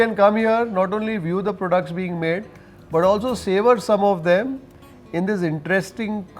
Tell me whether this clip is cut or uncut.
uncut